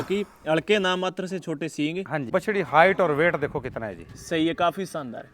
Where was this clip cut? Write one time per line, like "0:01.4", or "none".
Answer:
0:02.3